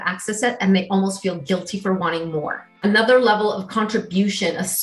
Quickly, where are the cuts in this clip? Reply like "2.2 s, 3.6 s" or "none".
2.6 s